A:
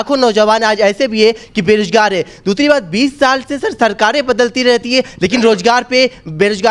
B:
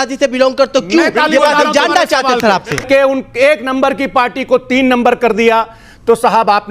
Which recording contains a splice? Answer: B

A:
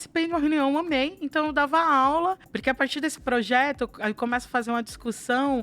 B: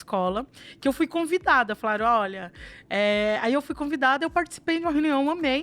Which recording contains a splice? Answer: A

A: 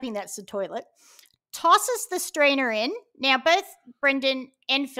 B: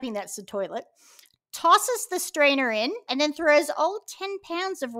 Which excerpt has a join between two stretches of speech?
B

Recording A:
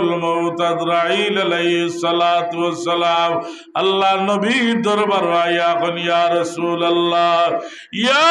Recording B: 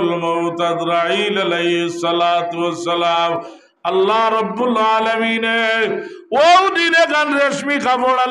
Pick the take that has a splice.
B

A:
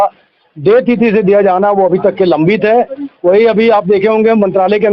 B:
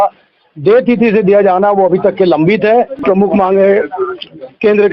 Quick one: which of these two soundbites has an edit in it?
B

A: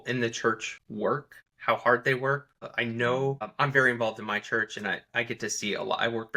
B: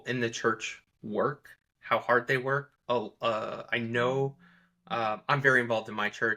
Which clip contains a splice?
A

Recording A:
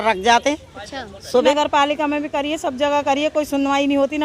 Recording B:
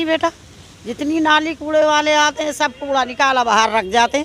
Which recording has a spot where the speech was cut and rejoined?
A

